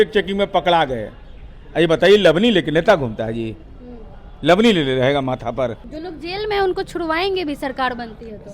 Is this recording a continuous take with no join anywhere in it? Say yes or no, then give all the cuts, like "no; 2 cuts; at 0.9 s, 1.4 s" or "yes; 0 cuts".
no; 1 cut; at 5.8 s